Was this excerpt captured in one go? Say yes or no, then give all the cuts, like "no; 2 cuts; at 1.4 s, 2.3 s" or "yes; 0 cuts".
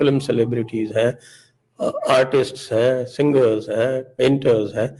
yes; 0 cuts